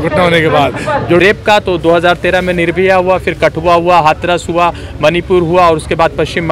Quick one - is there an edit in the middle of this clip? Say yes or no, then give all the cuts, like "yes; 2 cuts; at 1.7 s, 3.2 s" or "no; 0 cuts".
yes; 1 cut; at 1.2 s